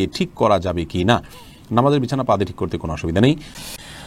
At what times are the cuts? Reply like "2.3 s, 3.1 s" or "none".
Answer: none